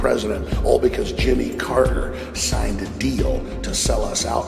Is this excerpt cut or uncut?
cut